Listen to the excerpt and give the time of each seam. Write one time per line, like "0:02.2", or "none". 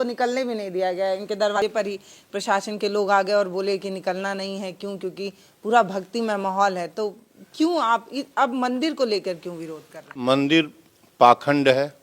0:01.6
0:10.1